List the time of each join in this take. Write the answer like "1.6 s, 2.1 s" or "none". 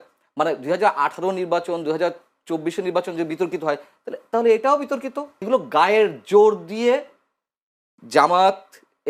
5.5 s